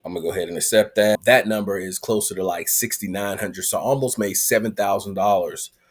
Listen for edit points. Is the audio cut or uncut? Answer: cut